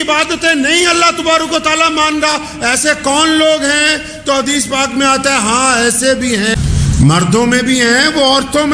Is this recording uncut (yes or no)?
no